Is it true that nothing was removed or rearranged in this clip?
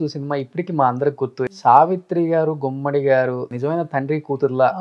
no; 1 cut; at 1.5 s

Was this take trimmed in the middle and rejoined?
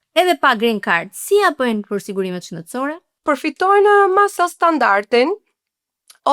yes; 1 cut; at 3.1 s

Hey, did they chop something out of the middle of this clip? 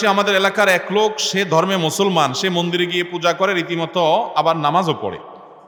no; 0 cuts

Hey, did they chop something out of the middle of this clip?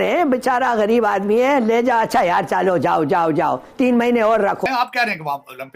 yes; 1 cut; at 4.7 s

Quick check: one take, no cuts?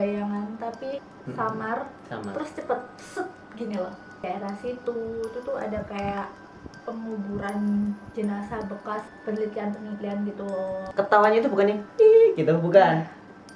no; 4 cuts; at 1.1 s, 4.2 s, 9.1 s, 10.8 s

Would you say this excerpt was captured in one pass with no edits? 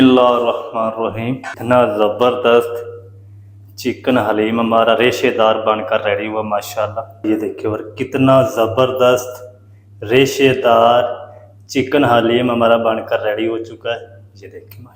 no; 2 cuts; at 1.5 s, 7.2 s

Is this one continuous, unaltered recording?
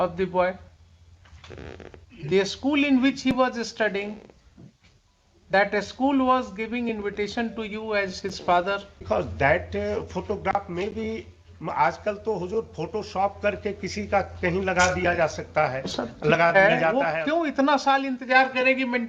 no; 2 cuts; at 9.0 s, 17.0 s

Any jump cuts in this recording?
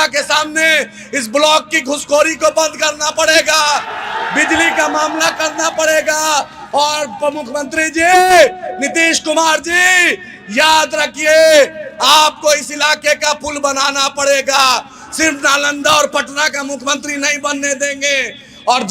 no; 0 cuts

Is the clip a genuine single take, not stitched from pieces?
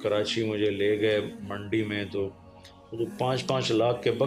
yes; 0 cuts

